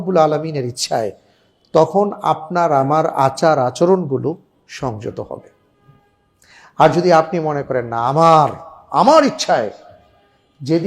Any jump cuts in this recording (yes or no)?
no